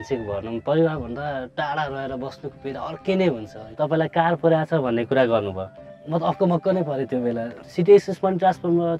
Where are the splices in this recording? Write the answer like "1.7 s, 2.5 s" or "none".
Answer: 3.6 s, 7.5 s